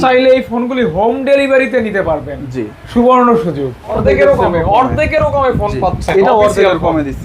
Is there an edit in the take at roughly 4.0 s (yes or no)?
yes